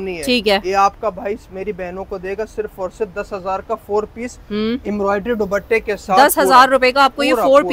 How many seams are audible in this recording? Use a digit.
0